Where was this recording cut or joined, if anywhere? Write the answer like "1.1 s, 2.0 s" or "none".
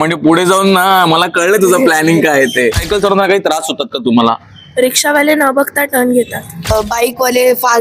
2.8 s, 6.7 s